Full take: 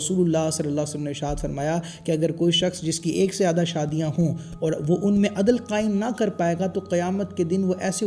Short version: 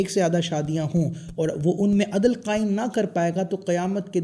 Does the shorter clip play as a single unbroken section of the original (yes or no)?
yes